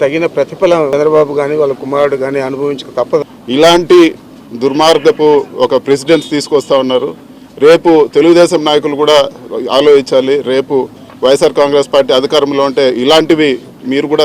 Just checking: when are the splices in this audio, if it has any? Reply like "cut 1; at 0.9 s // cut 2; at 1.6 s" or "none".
cut 1; at 0.9 s // cut 2; at 3.2 s

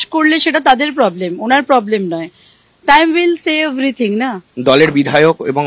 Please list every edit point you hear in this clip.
cut 1; at 4.4 s

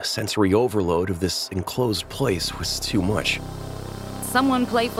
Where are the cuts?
cut 1; at 4.0 s

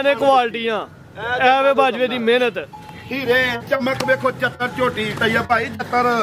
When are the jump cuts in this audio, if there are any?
none

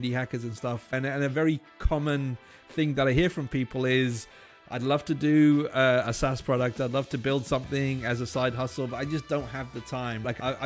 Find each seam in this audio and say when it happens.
none

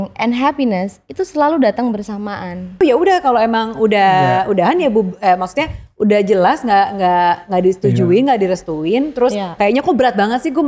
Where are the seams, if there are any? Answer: cut 1; at 2.8 s

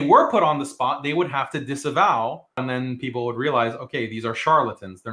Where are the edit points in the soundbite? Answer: cut 1; at 2.6 s

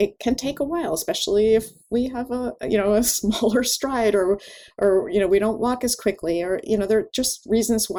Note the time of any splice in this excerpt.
none

